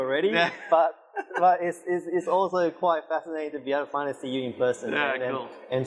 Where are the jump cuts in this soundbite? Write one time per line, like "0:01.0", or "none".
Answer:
none